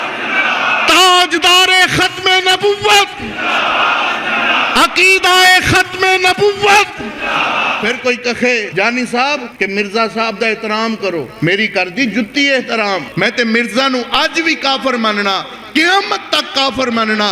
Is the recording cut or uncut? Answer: cut